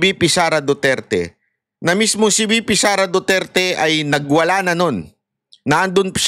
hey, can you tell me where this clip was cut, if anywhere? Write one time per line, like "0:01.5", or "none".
none